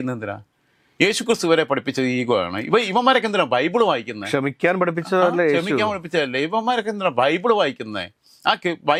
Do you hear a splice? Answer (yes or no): no